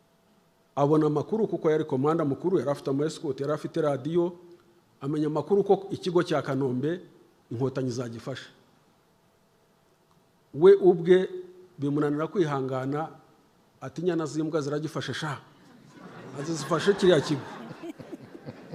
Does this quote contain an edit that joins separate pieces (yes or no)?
no